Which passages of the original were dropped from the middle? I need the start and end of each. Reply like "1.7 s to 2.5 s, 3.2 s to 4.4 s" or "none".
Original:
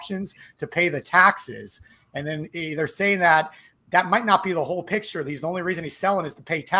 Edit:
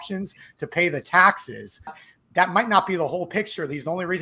2.1 s to 3.6 s